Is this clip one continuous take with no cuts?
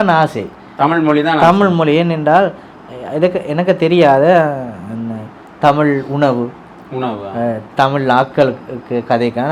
yes; 0 cuts

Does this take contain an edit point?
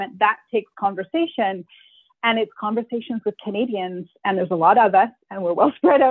no; 0 cuts

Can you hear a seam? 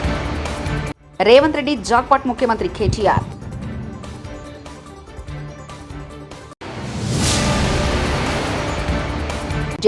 yes; 1 cut; at 0.9 s

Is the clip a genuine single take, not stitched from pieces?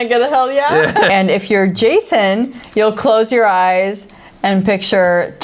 no; 1 cut; at 1.1 s

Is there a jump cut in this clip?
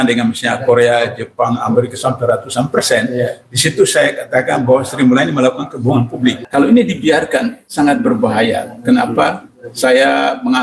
yes; 2 cuts; at 6.4 s, 7.6 s

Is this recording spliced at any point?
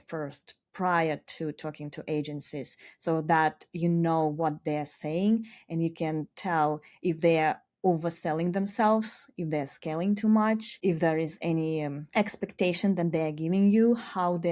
yes; 2 cuts; at 10.7 s, 12.0 s

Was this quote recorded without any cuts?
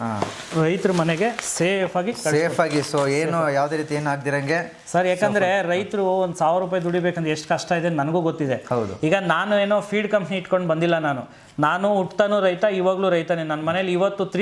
yes; 0 cuts

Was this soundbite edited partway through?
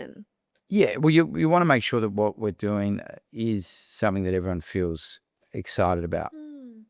yes; 1 cut; at 3.2 s

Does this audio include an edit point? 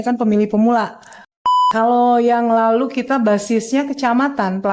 yes; 1 cut; at 1.5 s

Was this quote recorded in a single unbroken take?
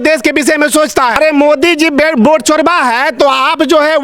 no; 1 cut; at 1.2 s

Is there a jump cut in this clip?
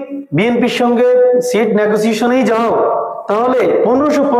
no; 0 cuts

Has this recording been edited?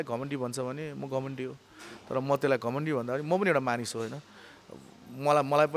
no; 0 cuts

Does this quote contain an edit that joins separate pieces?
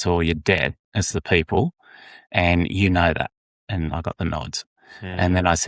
no; 0 cuts

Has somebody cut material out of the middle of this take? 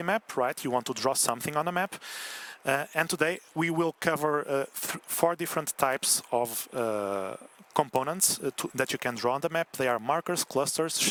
no; 0 cuts

